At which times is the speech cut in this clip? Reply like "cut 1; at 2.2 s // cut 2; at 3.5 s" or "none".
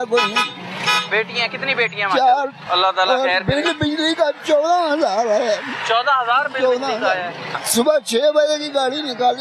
cut 1; at 7.6 s